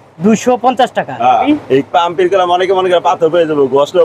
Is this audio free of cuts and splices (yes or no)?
no